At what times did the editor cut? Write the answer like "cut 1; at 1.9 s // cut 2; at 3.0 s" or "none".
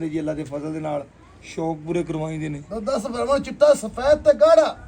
none